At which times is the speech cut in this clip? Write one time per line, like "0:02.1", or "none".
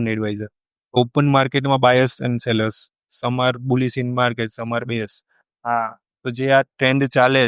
0:01.0
0:05.3